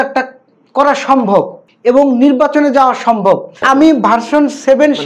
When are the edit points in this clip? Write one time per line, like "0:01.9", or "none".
0:01.6
0:03.6